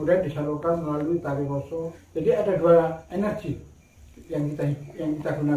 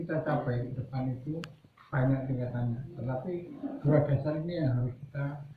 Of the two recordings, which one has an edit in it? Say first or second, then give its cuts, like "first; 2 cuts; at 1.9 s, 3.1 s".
first; 2 cuts; at 2.0 s, 3.0 s